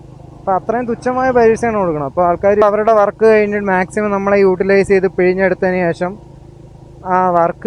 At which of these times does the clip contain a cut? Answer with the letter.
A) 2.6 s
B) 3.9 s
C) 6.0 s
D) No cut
A